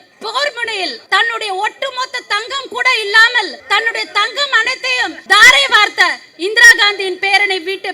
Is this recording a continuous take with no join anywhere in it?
no; 3 cuts; at 1.0 s, 3.6 s, 5.2 s

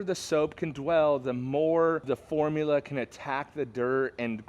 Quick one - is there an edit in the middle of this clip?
yes; 1 cut; at 2.0 s

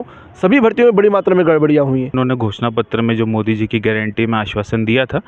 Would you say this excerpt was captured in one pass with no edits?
no; 1 cut; at 2.2 s

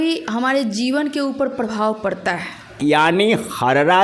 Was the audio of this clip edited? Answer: yes; 1 cut; at 2.7 s

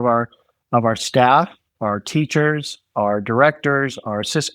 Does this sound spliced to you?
yes; 1 cut; at 1.7 s

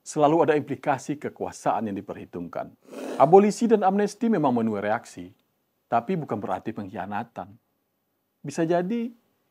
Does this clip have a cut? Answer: yes; 1 cut; at 3.1 s

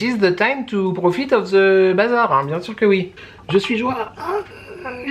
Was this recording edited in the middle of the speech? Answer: yes; 1 cut; at 3.1 s

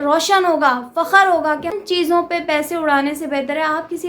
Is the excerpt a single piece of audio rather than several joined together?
no; 1 cut; at 1.7 s

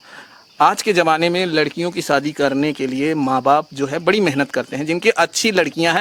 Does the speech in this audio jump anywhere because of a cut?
no; 0 cuts

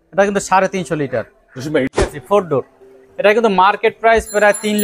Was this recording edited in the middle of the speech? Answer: yes; 1 cut; at 2.1 s

